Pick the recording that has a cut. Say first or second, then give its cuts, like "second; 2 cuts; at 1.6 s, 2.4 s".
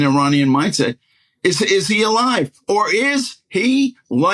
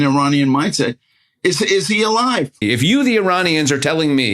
second; 1 cut; at 2.6 s